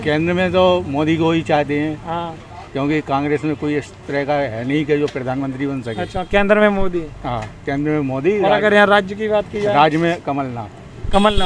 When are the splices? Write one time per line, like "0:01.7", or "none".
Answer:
none